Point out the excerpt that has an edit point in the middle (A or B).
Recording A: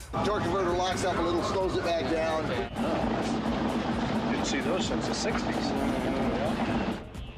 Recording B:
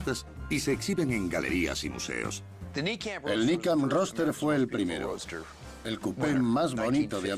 A